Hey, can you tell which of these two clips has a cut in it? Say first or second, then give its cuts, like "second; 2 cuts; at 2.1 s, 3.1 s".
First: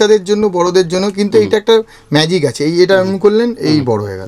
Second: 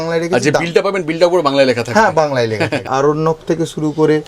second; 1 cut; at 2.9 s